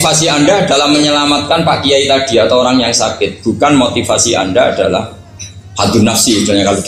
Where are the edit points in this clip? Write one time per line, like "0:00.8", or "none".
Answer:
none